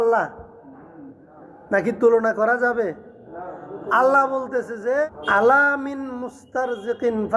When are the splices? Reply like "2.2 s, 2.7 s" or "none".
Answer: 5.2 s

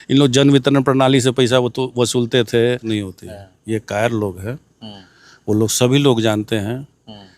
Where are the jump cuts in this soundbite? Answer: 2.9 s

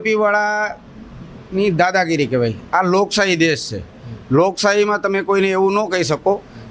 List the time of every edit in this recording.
none

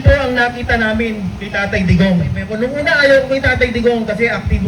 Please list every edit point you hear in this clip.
2.5 s

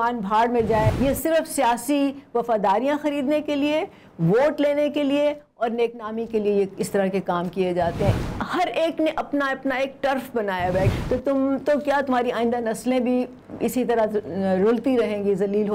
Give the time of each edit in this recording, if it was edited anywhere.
0.9 s, 8.1 s, 10.9 s

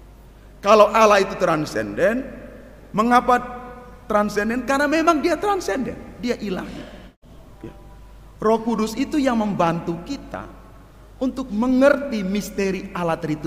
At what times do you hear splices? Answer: 7.2 s

